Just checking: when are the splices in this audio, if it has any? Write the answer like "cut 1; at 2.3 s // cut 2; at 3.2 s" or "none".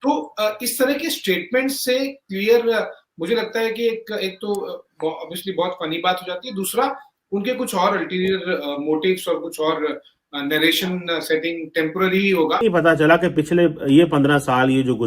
cut 1; at 12.6 s